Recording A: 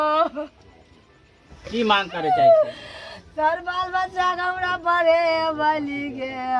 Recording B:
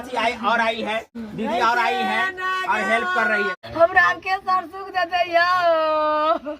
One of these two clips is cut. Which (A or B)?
B